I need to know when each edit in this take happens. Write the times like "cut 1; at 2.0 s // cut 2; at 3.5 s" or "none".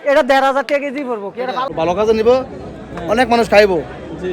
cut 1; at 1.7 s

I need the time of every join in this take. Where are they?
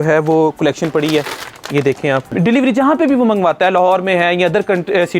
cut 1; at 2.3 s

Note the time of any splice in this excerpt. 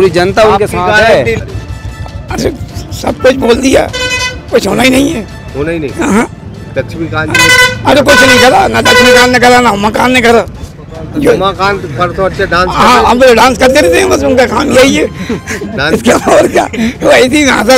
cut 1; at 1.4 s

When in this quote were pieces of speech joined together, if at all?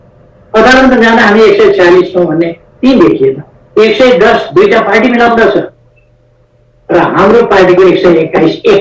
cut 1; at 3.5 s

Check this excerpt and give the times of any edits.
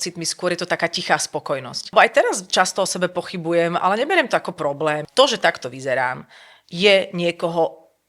cut 1; at 1.9 s // cut 2; at 5.1 s

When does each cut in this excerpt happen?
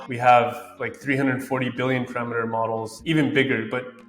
cut 1; at 2.9 s

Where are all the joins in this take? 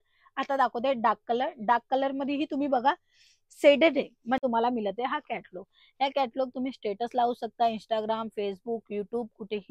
cut 1; at 4.4 s

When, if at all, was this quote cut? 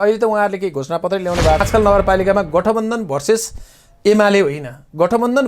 cut 1; at 1.6 s

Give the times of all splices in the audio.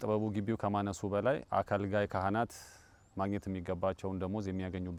none

